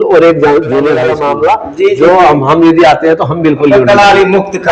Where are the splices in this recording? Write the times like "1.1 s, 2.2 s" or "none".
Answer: 1.1 s